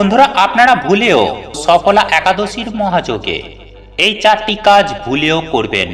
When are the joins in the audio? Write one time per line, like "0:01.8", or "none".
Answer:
0:01.6